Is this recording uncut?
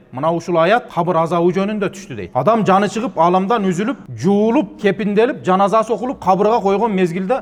yes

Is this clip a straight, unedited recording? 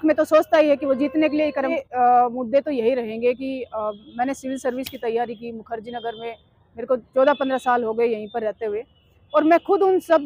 no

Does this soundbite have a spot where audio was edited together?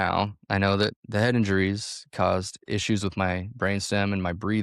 no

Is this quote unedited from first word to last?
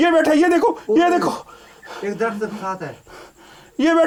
yes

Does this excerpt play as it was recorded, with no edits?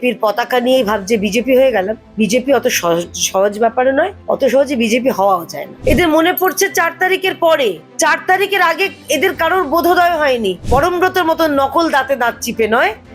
no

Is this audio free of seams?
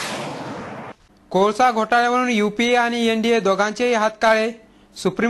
no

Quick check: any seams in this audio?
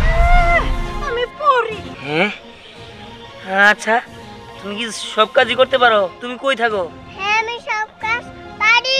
yes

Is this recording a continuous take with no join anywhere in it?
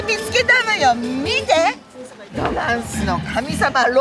no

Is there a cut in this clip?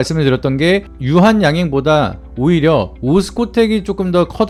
no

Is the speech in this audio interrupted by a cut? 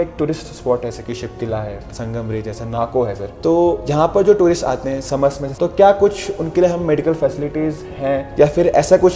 yes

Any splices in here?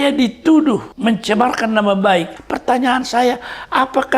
yes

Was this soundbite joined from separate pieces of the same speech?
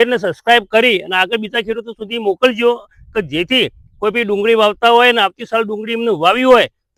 no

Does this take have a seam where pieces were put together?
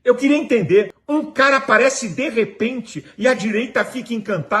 yes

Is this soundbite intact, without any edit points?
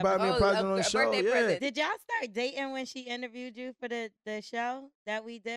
no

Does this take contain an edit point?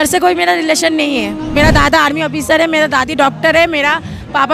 yes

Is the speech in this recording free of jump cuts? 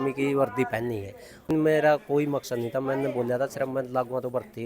no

